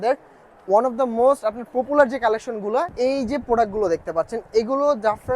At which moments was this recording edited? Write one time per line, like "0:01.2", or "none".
0:02.9